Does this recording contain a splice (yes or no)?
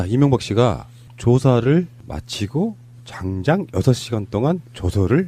no